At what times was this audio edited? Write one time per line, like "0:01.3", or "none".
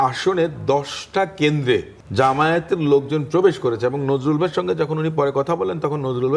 0:02.0

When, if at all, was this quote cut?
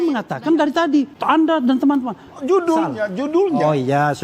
0:01.1

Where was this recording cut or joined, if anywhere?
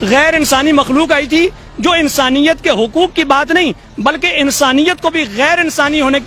none

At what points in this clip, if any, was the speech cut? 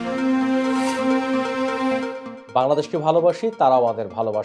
none

